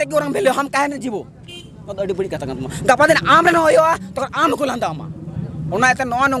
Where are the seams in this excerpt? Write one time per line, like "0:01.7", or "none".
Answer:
none